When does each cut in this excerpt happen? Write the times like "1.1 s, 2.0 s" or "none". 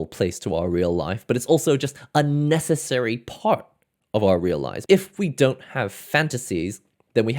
4.7 s